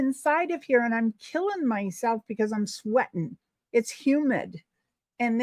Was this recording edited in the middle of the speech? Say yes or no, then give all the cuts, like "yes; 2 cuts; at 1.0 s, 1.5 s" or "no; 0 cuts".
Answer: no; 0 cuts